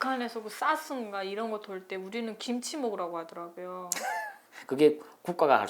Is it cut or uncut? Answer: uncut